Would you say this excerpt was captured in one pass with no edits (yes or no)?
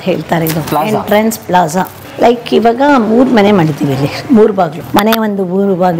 no